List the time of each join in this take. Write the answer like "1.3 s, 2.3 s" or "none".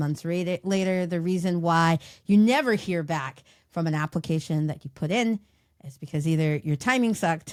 none